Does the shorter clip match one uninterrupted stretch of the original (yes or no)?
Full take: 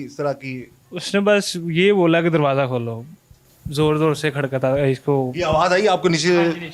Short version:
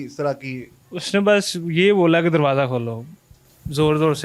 yes